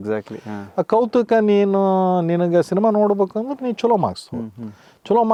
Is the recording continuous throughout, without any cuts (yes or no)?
yes